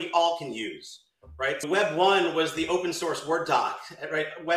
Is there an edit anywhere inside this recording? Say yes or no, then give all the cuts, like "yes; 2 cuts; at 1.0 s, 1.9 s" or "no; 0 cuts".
no; 0 cuts